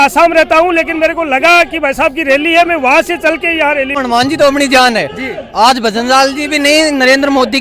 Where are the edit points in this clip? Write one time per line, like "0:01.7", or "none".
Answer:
0:04.0